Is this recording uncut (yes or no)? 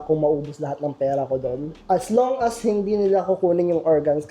no